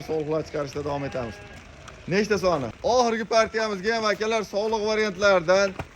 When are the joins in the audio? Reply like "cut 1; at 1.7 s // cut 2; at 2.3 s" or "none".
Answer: cut 1; at 2.7 s